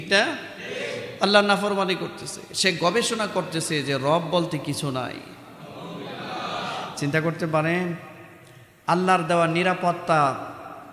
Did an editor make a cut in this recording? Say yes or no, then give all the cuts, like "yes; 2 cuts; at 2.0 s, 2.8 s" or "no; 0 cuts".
no; 0 cuts